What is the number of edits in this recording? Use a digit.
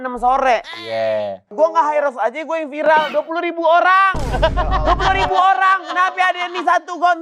1